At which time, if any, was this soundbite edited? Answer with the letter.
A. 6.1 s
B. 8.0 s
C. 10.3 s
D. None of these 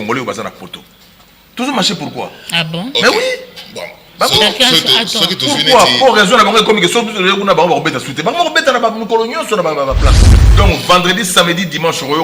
C